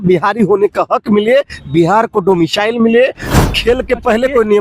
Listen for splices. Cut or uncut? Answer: cut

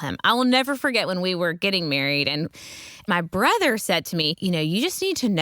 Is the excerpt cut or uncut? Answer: cut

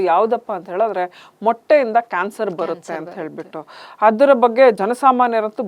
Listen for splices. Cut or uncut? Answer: cut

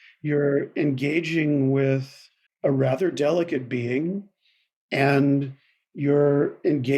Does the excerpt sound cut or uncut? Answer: uncut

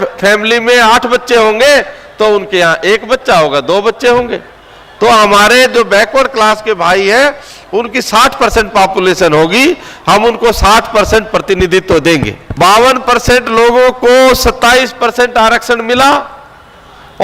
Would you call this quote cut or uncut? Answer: cut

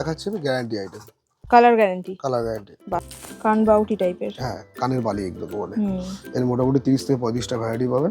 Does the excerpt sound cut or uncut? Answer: cut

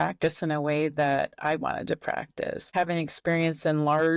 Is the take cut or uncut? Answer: cut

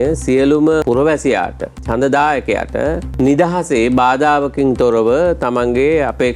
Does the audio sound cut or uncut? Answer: cut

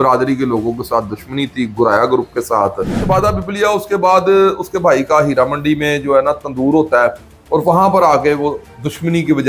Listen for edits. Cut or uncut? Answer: cut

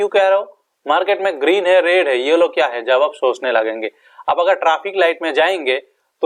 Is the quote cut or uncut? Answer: uncut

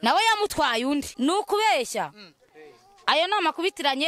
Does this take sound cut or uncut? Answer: cut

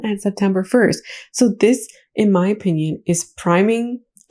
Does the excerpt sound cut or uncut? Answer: uncut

